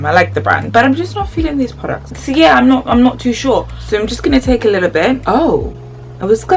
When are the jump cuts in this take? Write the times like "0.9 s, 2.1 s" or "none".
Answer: 3.7 s